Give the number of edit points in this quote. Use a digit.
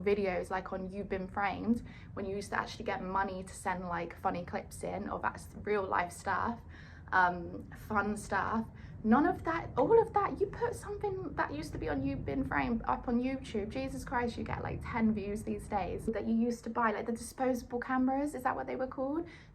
1